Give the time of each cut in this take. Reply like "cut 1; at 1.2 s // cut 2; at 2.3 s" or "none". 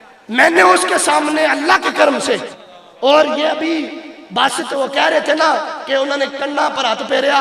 cut 1; at 2.4 s